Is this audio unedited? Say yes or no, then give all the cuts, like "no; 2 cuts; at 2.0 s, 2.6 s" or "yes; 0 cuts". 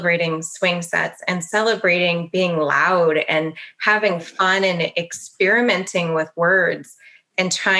yes; 0 cuts